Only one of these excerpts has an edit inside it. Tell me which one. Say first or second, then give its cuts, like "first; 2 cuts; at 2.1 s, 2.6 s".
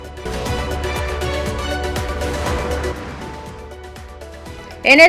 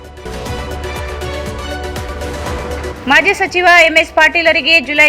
second; 1 cut; at 2.6 s